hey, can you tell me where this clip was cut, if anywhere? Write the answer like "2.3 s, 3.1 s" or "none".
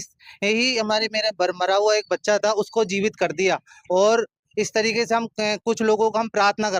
none